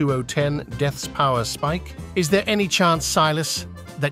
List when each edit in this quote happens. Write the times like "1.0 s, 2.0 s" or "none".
2.0 s